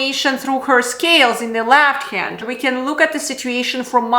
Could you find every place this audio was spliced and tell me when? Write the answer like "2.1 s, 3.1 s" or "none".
2.4 s